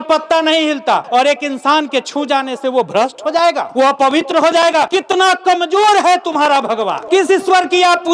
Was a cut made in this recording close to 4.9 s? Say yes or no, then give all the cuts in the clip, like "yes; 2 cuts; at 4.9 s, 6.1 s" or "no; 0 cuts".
yes; 4 cuts; at 1.0 s, 3.7 s, 4.9 s, 7.0 s